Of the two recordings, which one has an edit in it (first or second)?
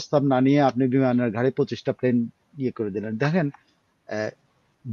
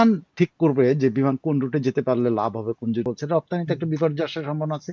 second